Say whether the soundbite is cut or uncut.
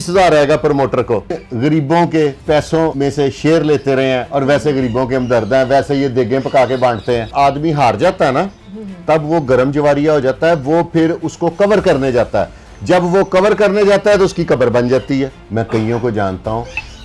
cut